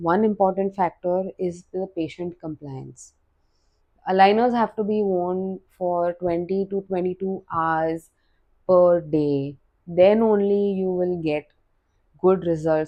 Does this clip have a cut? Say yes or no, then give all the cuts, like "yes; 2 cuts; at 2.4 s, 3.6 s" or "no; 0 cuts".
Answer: no; 0 cuts